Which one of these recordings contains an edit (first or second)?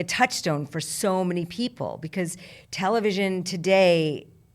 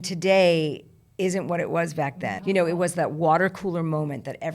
second